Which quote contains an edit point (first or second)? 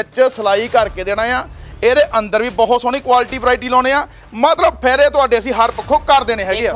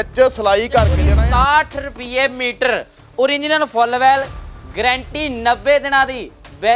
second